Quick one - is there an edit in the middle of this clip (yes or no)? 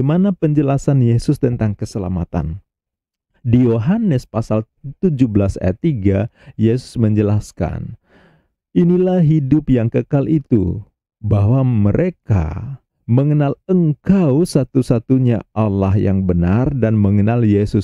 no